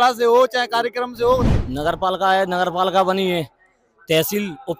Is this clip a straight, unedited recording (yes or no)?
no